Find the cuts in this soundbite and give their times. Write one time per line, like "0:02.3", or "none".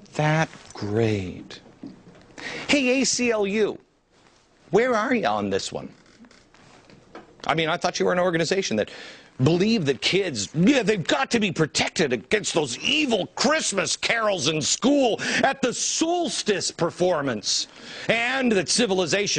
none

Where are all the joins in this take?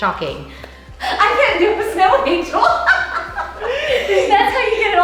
0:01.0

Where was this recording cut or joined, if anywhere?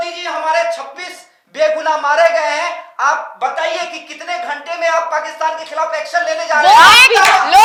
none

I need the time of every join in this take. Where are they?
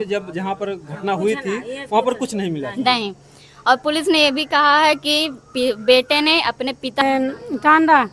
0:07.0

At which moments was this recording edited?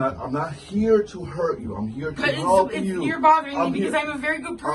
none

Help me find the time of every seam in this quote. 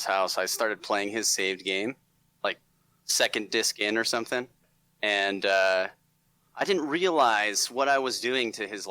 0:04.6

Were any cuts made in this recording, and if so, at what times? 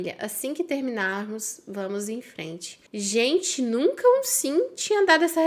none

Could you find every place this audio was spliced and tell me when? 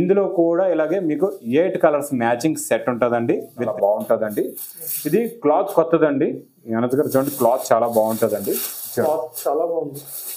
0:03.7

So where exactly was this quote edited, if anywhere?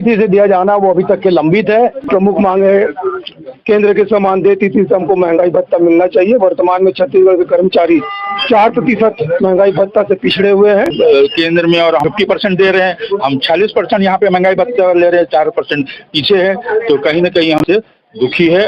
0:02.1
0:10.9
0:12.0
0:17.6

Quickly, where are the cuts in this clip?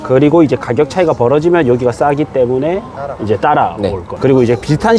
0:04.1

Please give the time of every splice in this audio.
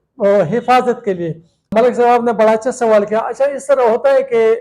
0:01.7

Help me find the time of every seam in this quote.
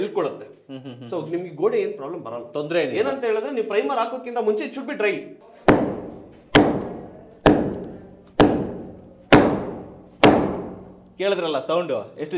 0:05.3

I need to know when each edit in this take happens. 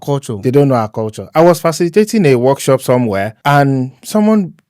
0:03.3

